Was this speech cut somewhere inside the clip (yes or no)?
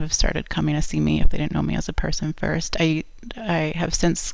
no